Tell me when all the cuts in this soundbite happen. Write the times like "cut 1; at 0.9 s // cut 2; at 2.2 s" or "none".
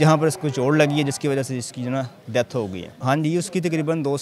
cut 1; at 2.9 s